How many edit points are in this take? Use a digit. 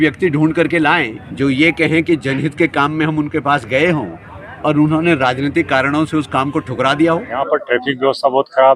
2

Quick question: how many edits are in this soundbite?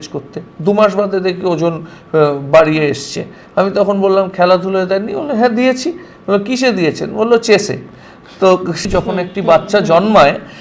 1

